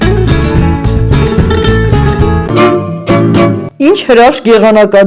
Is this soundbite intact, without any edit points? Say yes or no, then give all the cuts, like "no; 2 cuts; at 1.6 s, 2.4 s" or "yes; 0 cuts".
no; 1 cut; at 2.5 s